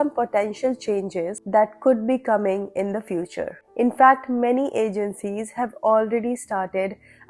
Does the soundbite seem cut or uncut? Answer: uncut